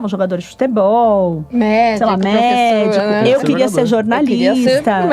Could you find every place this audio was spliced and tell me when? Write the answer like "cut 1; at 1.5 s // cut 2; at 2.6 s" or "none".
none